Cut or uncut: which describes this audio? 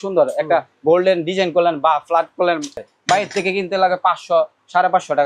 cut